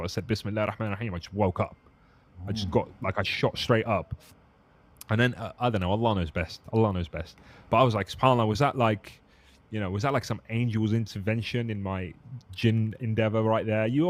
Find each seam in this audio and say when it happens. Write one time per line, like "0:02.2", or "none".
none